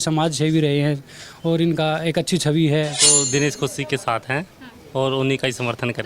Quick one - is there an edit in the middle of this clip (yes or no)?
yes